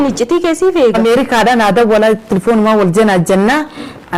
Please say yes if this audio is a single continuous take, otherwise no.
no